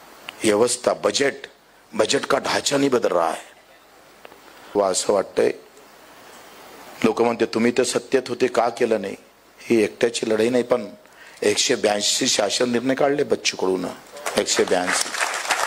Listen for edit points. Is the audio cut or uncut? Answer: cut